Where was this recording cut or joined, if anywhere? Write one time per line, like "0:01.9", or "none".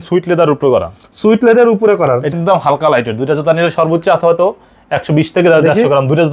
0:02.3